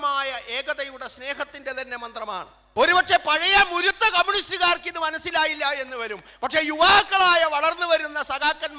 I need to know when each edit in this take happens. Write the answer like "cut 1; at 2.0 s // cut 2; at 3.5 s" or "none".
cut 1; at 2.7 s